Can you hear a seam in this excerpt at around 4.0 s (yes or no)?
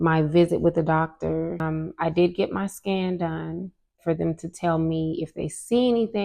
yes